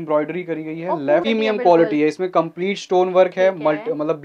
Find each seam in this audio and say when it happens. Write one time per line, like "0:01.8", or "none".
0:01.2